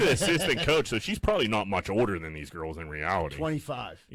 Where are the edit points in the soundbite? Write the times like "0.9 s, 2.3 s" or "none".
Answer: none